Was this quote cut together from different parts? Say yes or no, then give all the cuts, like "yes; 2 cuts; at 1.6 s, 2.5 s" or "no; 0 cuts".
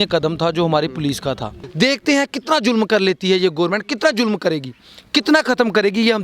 yes; 1 cut; at 1.6 s